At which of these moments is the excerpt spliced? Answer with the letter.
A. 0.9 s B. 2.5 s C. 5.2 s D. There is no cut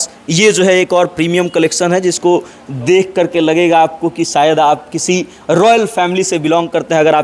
D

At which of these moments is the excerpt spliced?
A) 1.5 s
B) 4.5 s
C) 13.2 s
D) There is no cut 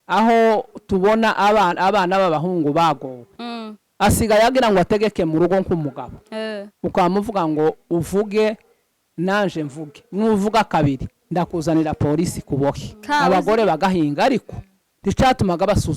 C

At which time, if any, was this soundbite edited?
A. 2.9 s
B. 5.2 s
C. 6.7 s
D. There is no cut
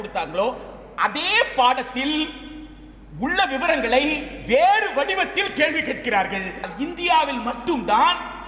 C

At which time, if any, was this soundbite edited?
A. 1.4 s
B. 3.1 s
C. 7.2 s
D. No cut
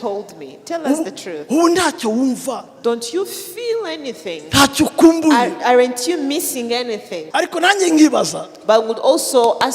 C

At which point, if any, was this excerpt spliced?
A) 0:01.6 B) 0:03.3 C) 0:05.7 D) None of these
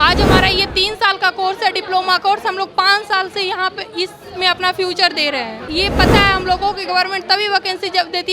C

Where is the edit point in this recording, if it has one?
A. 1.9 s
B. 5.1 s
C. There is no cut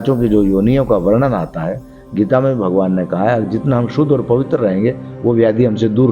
C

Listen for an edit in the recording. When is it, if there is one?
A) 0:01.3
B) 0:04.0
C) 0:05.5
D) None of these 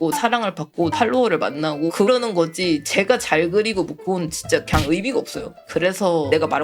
D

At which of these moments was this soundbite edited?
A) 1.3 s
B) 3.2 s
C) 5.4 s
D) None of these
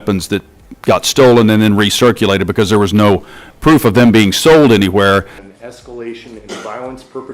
C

